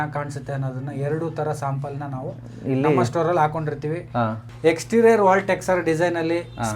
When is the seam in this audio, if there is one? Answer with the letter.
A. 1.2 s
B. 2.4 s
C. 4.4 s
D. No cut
C